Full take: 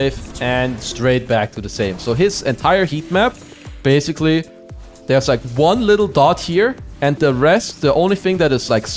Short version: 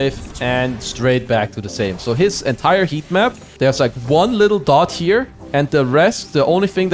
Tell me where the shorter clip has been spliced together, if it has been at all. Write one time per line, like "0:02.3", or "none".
0:03.4

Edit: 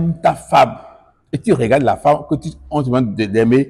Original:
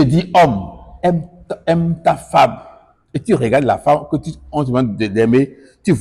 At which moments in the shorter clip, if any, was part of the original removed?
none

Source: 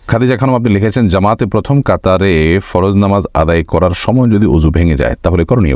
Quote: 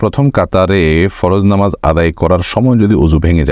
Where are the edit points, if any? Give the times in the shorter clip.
none

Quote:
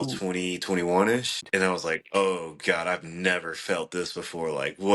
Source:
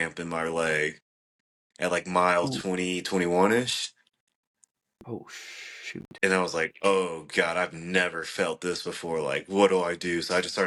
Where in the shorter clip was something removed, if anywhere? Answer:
0:01.4

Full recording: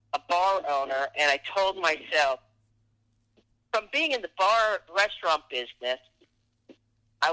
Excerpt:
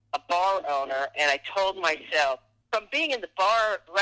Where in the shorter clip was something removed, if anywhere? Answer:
0:02.5

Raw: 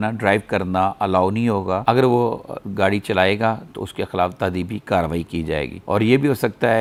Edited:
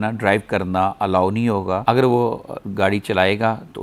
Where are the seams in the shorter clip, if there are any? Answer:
none

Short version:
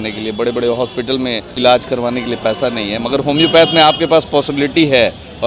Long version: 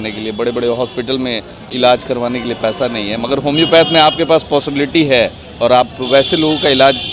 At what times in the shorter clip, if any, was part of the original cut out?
0:01.5

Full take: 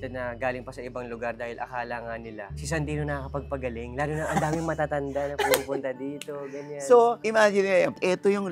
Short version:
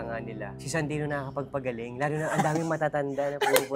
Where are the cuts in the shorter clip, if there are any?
none

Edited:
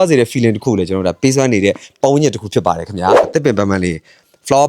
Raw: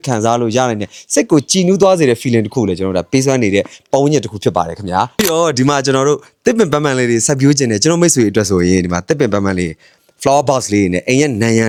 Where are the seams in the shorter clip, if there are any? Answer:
0:03.2

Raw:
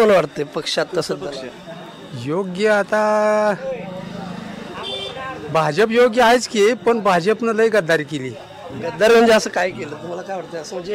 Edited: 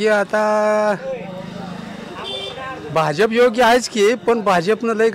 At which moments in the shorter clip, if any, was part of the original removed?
none

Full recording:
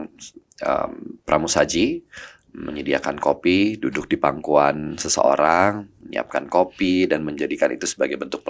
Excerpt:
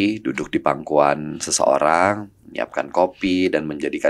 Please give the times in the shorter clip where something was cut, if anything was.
none

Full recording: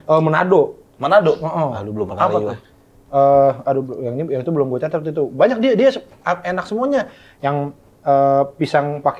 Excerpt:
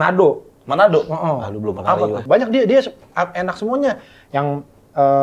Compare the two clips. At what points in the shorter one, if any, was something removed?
0:02.2

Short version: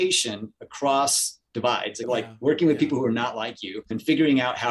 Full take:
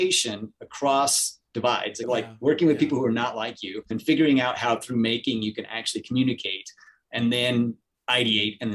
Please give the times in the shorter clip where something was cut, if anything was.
none

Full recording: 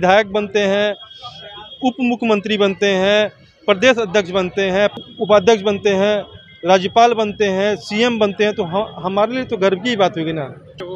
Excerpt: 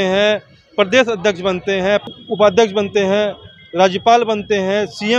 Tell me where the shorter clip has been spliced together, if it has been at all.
none

